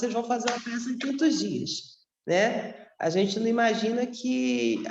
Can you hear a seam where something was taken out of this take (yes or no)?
no